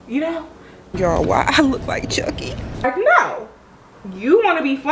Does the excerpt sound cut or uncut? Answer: cut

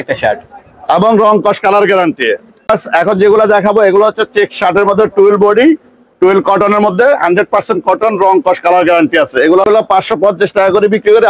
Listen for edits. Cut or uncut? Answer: cut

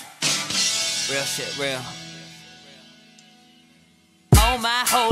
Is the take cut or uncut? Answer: uncut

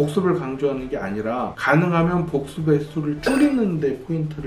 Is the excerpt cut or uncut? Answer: cut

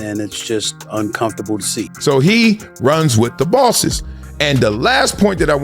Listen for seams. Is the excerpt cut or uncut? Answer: cut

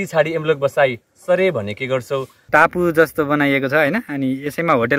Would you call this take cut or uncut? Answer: cut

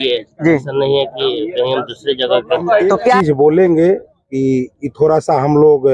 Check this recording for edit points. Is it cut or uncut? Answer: cut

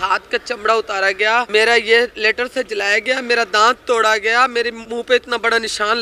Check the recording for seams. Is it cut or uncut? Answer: cut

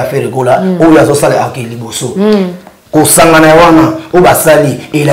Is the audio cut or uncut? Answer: uncut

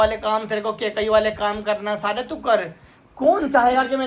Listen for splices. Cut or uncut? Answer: uncut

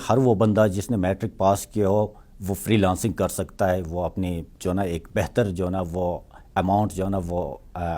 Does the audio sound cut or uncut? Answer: uncut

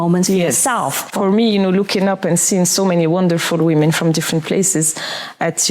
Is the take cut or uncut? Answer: cut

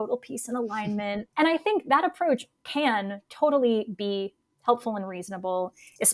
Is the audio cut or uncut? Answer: cut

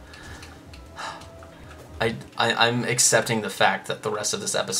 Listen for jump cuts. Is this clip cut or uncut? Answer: cut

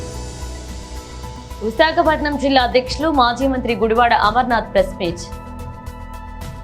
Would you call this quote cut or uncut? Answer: cut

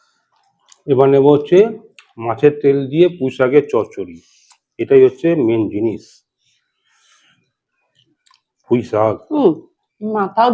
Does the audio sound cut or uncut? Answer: uncut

